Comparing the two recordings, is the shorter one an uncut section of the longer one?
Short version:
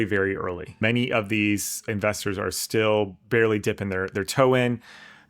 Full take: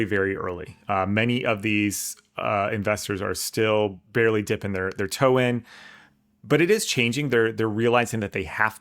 no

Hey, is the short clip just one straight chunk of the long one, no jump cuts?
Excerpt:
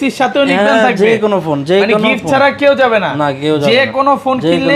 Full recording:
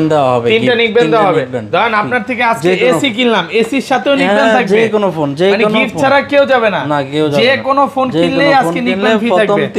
yes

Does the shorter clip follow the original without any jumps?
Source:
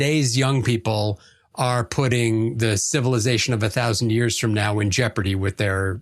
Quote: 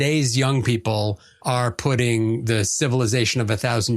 no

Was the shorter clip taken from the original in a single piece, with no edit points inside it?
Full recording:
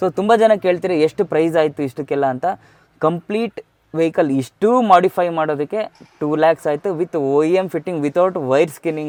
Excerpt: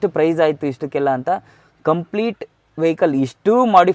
yes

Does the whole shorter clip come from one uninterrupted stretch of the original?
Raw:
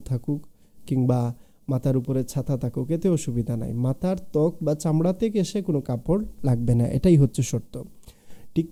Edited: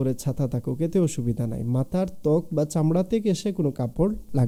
yes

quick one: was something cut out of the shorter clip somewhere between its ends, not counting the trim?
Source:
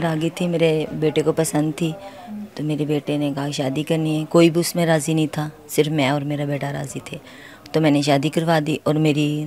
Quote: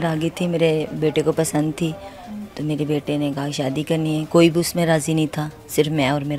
no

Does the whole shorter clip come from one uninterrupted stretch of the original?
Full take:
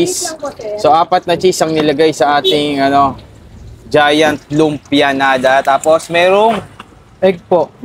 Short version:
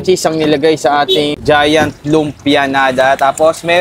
no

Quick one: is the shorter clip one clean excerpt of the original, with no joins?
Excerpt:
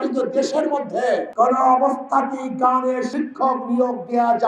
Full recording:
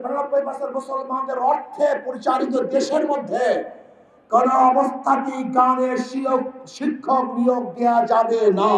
no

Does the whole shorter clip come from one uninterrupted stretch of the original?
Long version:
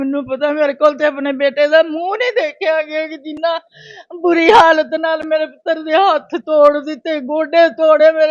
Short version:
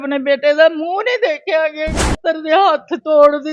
no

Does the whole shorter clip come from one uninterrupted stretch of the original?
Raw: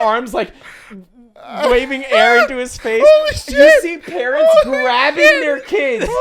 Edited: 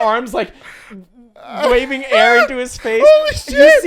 yes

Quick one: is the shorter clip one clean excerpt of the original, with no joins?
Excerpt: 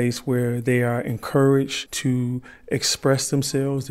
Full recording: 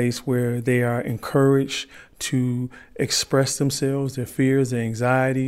no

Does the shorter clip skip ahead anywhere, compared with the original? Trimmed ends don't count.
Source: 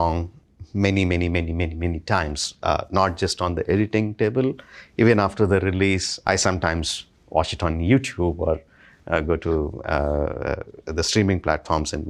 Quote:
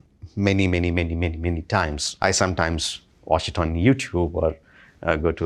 yes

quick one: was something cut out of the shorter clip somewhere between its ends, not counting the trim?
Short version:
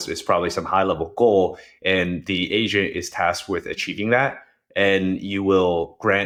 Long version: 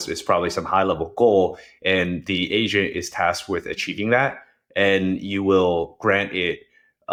no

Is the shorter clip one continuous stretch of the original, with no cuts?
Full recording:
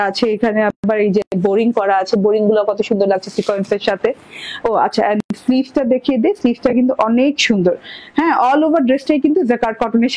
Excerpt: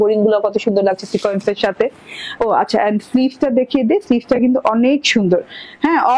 no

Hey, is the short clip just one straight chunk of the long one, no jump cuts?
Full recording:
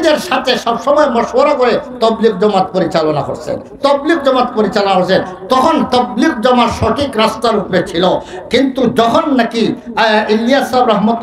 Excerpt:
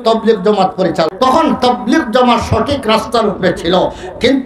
no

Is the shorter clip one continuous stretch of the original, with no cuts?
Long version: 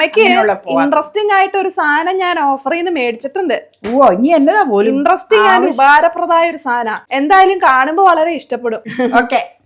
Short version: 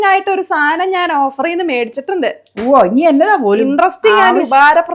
yes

